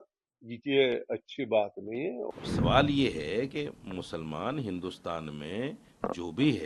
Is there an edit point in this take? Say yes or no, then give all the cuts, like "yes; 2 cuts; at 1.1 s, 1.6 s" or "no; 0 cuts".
yes; 1 cut; at 2.3 s